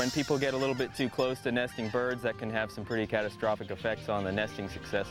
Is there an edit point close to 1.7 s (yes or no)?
no